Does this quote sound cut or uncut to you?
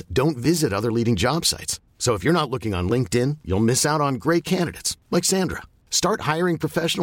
uncut